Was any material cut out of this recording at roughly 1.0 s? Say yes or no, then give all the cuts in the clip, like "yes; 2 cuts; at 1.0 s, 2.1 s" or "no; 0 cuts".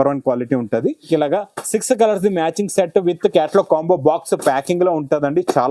yes; 1 cut; at 1.0 s